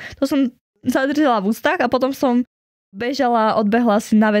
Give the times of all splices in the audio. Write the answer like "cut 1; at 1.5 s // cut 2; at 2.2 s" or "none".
cut 1; at 2.9 s